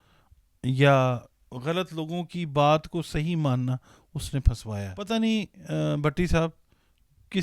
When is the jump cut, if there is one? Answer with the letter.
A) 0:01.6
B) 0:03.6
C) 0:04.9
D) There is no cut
C